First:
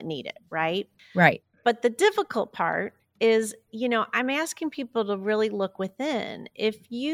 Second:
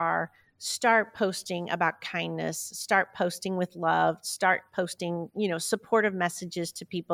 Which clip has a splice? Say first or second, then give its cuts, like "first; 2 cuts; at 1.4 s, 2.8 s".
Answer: first; 2 cuts; at 1.0 s, 3.0 s